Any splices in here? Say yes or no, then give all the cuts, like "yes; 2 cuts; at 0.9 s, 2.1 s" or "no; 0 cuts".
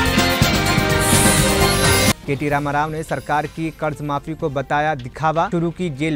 no; 0 cuts